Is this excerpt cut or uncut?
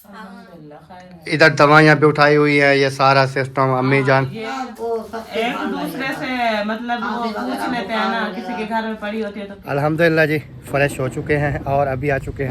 cut